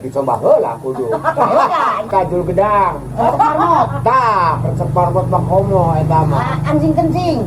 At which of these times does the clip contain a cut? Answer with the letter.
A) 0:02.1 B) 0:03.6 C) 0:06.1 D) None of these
A